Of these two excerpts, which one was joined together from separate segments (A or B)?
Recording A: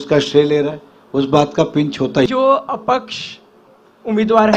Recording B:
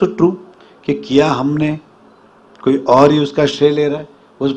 A